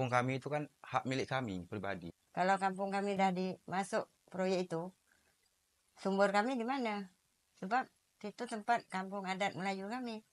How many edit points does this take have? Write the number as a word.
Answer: one